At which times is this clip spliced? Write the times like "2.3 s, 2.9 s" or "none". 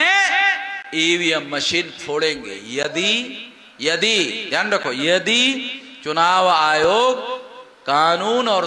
none